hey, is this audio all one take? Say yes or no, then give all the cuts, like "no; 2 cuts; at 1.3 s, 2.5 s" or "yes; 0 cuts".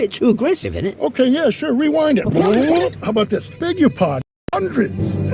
no; 1 cut; at 4.3 s